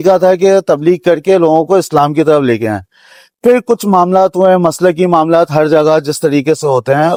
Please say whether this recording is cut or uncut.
uncut